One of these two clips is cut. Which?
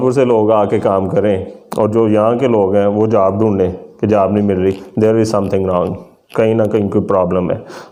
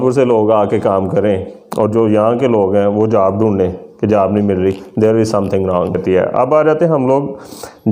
second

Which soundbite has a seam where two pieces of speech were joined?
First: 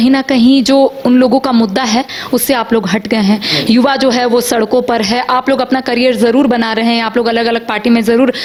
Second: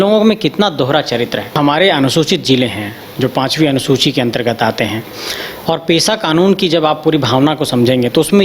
second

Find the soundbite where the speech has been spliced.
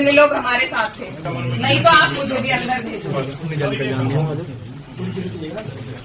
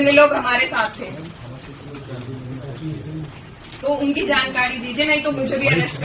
first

